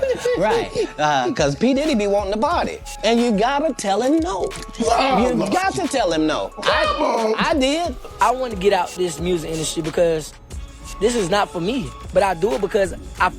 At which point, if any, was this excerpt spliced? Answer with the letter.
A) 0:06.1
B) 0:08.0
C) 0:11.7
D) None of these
B